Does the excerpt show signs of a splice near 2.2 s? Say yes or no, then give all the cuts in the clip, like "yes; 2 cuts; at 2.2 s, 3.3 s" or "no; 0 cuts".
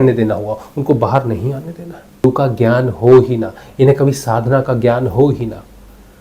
yes; 1 cut; at 2.2 s